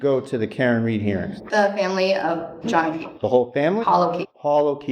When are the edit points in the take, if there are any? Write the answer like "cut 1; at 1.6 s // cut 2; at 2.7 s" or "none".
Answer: cut 1; at 1.4 s // cut 2; at 2.6 s // cut 3; at 3.8 s